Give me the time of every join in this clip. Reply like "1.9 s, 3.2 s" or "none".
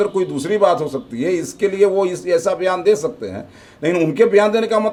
none